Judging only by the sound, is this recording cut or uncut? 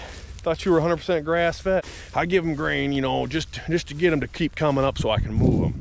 cut